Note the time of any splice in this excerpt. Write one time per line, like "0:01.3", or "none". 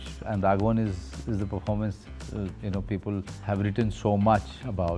0:03.3